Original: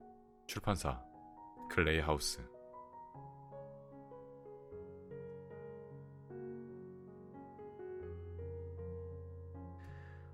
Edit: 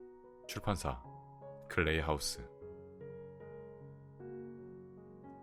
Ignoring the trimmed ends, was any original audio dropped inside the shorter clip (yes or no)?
yes